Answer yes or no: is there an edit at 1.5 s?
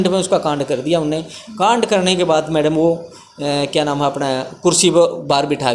no